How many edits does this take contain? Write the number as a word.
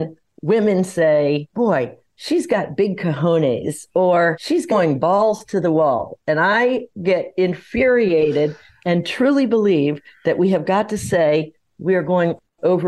one